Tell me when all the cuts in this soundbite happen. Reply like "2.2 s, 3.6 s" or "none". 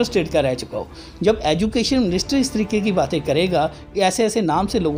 none